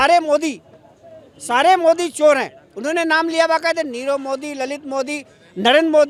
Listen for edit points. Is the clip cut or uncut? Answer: uncut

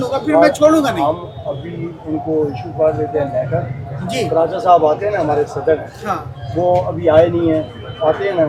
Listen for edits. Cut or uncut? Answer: uncut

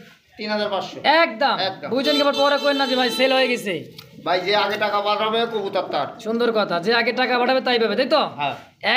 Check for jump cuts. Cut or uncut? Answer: uncut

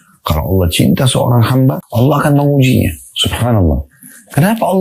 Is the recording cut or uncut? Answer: cut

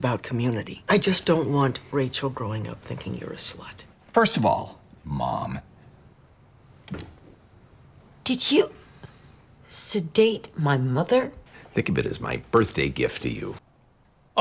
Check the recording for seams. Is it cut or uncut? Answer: uncut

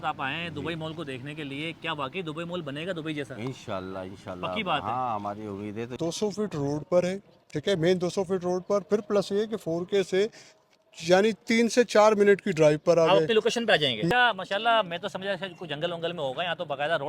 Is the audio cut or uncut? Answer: cut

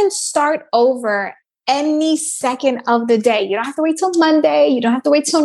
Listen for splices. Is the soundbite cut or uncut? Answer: uncut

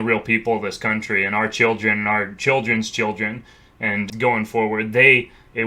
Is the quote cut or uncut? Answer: cut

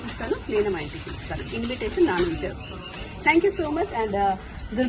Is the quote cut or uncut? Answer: uncut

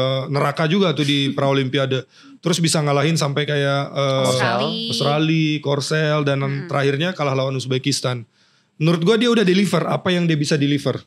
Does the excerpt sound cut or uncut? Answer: uncut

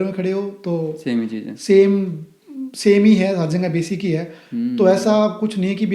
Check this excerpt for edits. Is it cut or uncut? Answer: uncut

